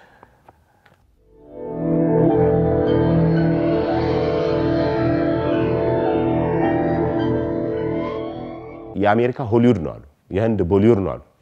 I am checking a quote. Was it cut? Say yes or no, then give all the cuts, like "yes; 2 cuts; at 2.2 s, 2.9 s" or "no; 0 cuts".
yes; 1 cut; at 8.8 s